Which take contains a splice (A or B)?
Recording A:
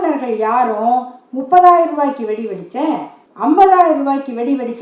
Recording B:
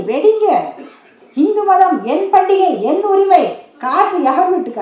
A